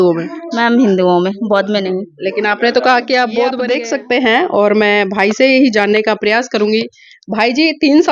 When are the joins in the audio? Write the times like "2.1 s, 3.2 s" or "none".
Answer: 3.7 s